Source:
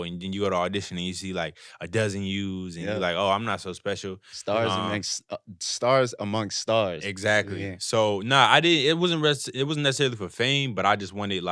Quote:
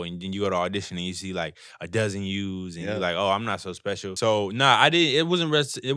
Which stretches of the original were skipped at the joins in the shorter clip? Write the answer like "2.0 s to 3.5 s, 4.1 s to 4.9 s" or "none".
4.1 s to 7.8 s